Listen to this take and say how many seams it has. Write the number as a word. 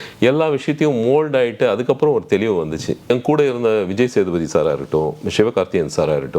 one